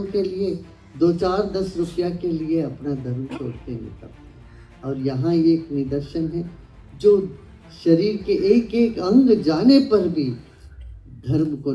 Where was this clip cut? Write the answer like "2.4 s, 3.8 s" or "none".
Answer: none